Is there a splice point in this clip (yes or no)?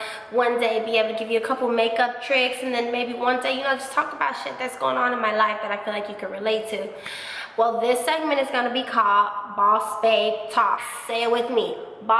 yes